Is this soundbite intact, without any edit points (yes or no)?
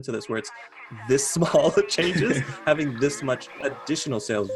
no